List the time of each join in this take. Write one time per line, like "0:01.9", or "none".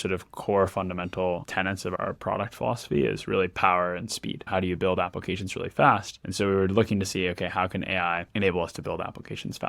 0:04.4
0:06.2